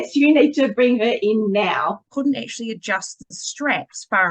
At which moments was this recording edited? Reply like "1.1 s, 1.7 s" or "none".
2.1 s